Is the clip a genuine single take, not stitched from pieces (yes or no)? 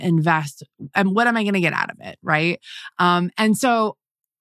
yes